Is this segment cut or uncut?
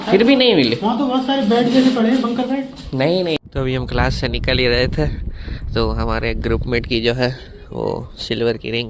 cut